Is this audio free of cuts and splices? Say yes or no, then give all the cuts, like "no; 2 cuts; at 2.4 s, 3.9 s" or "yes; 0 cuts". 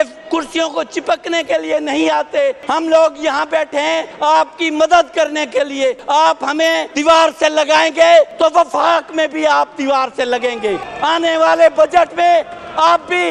no; 6 cuts; at 2.6 s, 4.1 s, 6.0 s, 6.9 s, 8.3 s, 10.9 s